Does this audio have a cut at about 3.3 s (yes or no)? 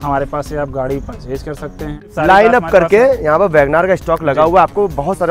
no